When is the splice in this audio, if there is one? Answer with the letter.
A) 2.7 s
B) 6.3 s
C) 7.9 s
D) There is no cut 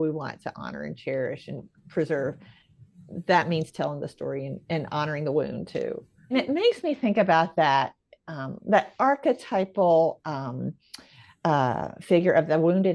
B